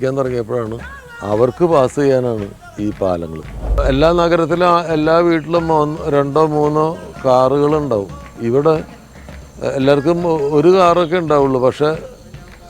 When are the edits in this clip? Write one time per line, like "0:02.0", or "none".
0:03.8

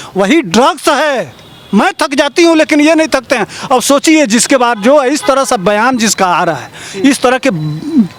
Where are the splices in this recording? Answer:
none

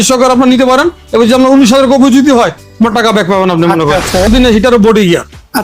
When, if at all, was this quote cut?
0:04.3

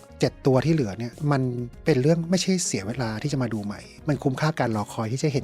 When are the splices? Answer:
0:03.9

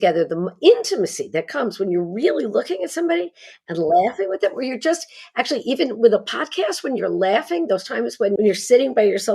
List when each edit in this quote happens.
0:08.4

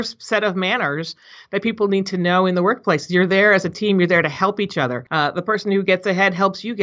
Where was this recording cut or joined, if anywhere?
0:05.0

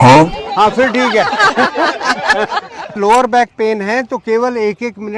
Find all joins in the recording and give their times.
0:03.0

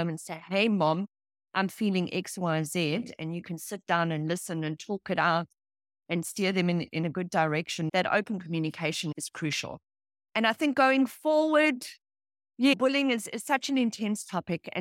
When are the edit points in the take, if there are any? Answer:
none

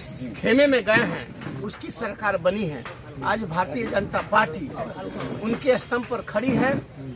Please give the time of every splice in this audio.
none

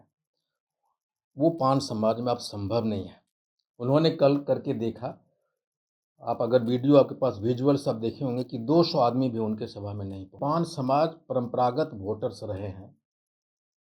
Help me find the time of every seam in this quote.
0:10.4

